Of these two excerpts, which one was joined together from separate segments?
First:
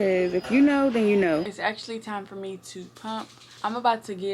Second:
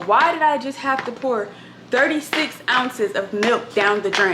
first; 2 cuts; at 1.5 s, 3.4 s

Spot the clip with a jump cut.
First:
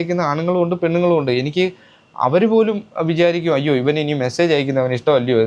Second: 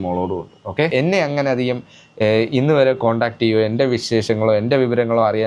second; 1 cut; at 0.9 s

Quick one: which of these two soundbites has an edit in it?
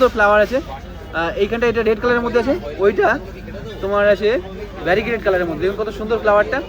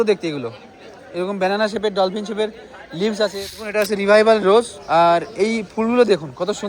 second; 1 cut; at 3.5 s

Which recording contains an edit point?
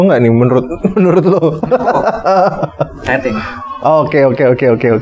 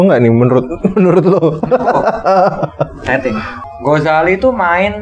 second; 1 cut; at 3.6 s

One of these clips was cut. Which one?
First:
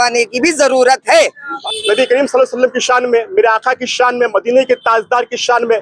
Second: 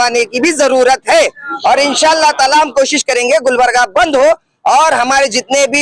first; 1 cut; at 1.5 s

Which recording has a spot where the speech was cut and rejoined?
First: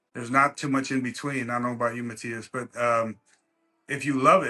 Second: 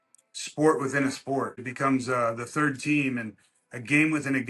second; 1 cut; at 1.6 s

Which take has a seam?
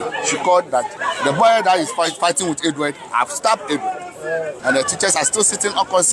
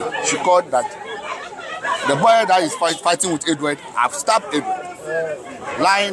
first; 2 cuts; at 1.0 s, 4.5 s

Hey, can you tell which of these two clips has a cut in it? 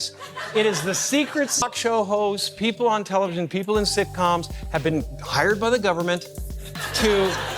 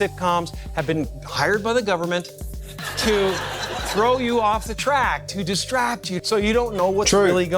first; 1 cut; at 1.5 s

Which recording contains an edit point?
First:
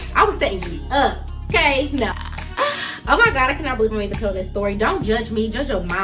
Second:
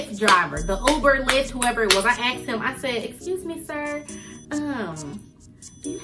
first; 1 cut; at 2.2 s

